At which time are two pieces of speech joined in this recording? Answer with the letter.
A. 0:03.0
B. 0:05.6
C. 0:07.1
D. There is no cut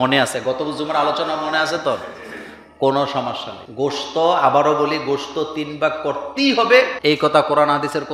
D